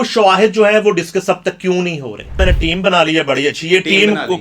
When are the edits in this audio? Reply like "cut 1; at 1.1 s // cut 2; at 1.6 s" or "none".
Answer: cut 1; at 2.4 s